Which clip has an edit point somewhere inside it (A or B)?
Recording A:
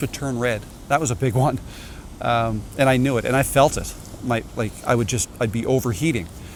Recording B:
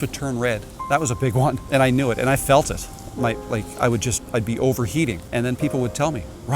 B